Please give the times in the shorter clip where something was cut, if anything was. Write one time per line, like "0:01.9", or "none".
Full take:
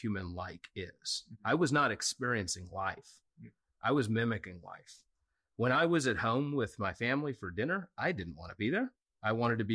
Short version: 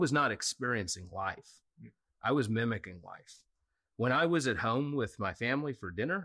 none

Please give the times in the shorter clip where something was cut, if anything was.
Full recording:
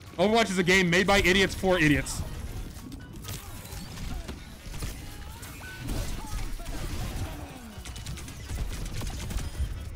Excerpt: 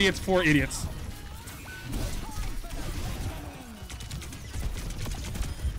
0:01.1

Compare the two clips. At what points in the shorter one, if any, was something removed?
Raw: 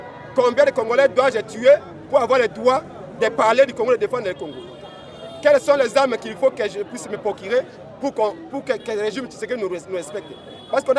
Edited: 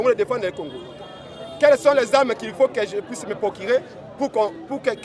none

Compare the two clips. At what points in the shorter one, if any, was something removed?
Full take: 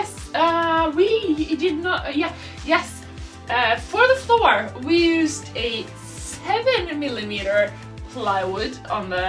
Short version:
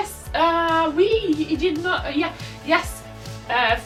none

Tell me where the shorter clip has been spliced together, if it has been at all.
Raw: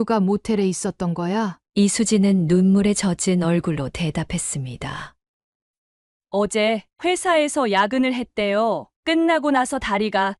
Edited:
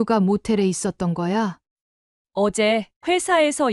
0:01.6

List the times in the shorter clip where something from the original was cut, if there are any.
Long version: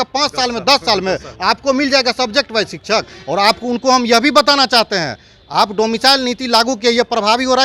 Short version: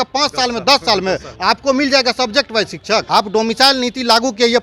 0:03.1

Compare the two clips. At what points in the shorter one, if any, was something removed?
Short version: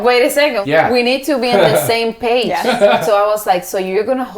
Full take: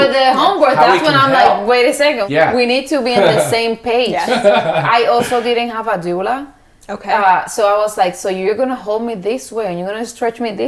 0:03.0

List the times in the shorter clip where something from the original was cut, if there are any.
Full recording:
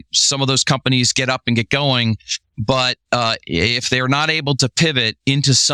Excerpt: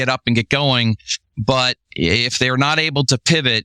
0:01.8

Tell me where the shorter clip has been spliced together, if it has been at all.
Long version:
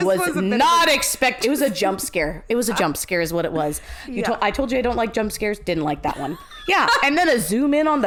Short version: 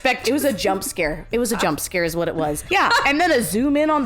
0:02.6

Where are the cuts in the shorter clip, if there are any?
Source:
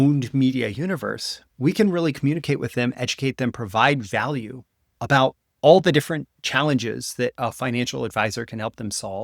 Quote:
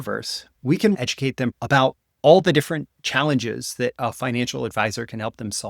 0:01.0

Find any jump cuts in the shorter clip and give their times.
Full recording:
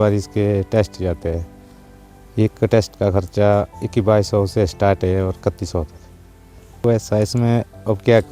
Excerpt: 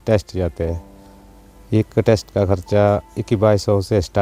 none

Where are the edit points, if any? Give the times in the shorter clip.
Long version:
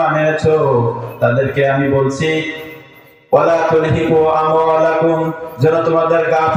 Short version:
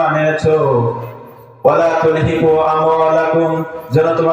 0:01.1

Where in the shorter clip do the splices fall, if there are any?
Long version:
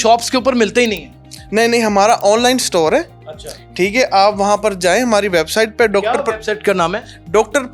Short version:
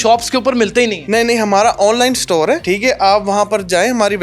0:01.0
0:02.6

